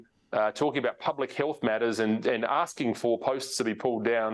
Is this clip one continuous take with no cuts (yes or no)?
yes